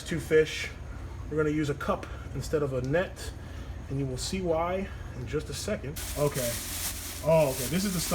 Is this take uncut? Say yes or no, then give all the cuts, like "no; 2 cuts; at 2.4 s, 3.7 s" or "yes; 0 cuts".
no; 1 cut; at 6.0 s